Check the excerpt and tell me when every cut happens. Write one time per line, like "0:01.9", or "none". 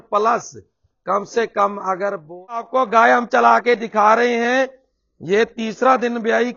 0:02.3